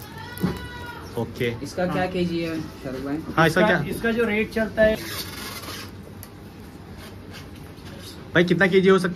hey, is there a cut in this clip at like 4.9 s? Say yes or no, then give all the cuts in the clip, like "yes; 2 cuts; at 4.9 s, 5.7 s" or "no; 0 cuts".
yes; 1 cut; at 4.9 s